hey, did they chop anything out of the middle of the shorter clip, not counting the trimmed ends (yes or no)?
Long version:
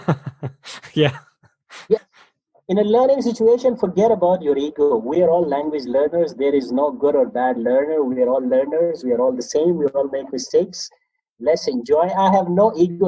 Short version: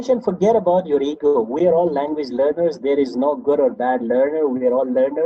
no